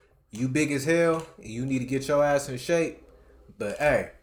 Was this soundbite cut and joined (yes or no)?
no